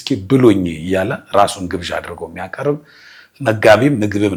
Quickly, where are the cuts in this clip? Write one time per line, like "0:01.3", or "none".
none